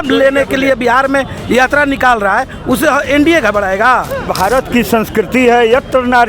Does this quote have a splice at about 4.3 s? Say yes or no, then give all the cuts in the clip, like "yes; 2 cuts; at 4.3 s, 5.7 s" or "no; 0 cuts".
yes; 1 cut; at 4.3 s